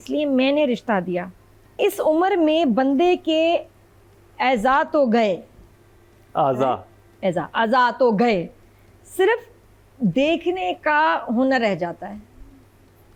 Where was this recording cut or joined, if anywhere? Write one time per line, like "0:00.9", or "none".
none